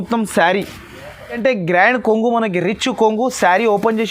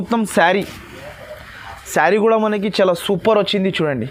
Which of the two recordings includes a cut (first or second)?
first